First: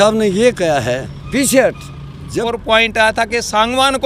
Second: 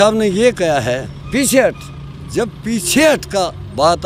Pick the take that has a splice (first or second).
first